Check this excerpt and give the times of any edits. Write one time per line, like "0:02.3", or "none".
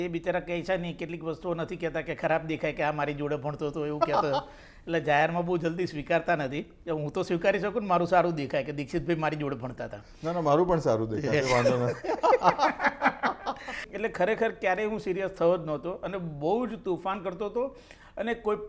0:13.8